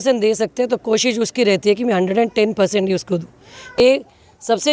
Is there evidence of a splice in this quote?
yes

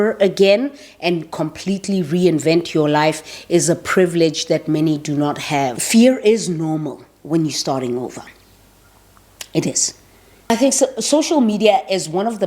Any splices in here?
yes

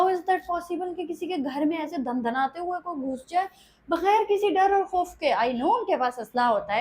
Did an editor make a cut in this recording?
no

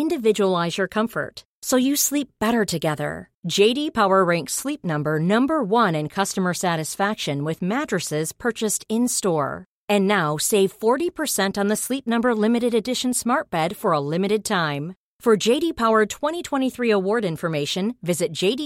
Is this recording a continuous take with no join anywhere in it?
yes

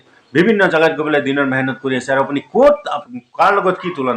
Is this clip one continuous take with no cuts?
no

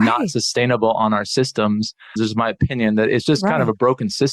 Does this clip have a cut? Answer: yes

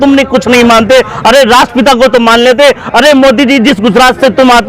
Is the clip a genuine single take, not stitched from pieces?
yes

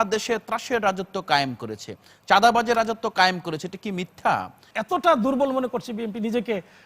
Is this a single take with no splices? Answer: no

